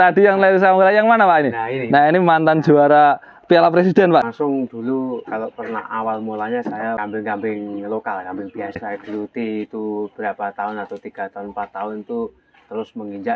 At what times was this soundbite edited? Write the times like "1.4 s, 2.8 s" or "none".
4.2 s, 7.0 s, 8.8 s